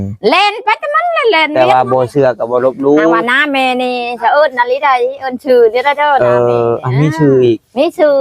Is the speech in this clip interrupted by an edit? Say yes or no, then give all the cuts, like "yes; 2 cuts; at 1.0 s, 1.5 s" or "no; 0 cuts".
yes; 1 cut; at 1.5 s